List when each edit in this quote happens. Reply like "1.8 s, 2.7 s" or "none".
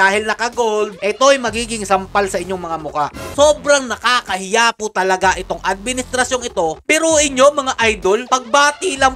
1.0 s, 3.2 s, 6.8 s